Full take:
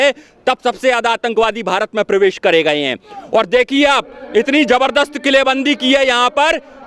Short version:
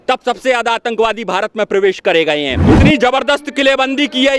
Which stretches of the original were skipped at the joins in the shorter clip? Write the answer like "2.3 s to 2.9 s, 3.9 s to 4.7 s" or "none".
3.0 s to 4.3 s